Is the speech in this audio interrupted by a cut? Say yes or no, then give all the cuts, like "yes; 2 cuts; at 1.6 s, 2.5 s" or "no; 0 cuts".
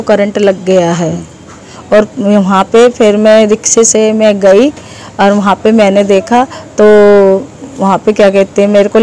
no; 0 cuts